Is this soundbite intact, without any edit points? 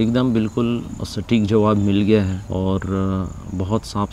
no; 1 cut; at 2.4 s

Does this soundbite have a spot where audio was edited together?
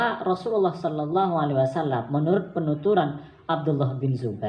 no; 0 cuts

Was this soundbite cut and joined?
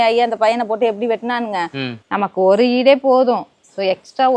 yes; 1 cut; at 2.0 s

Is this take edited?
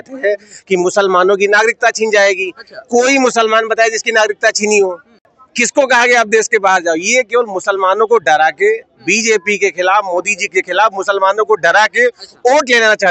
no; 0 cuts

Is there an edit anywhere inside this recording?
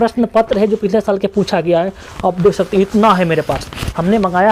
no; 0 cuts

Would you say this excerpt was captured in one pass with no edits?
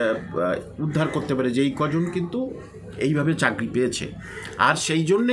yes; 0 cuts

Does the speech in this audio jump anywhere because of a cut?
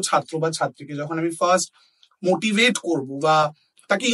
no; 0 cuts

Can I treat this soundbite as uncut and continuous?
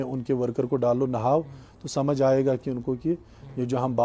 yes; 0 cuts

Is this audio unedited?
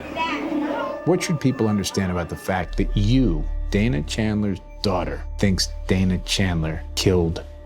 no; 1 cut; at 5.2 s

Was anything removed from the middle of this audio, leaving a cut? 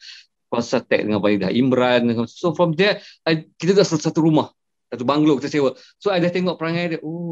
no; 0 cuts

